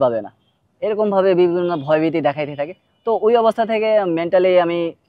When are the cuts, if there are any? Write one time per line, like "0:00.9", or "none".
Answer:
none